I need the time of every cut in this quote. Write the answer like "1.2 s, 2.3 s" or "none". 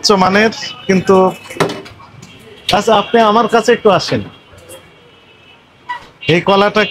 none